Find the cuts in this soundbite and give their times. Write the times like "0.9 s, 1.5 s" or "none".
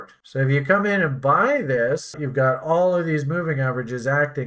2.2 s